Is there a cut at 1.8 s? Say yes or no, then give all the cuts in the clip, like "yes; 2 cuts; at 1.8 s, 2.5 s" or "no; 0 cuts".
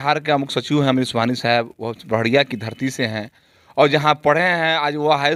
no; 0 cuts